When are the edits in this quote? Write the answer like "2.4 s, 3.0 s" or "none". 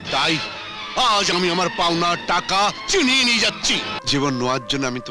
3.9 s